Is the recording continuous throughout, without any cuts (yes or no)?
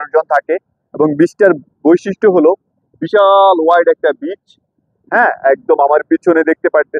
yes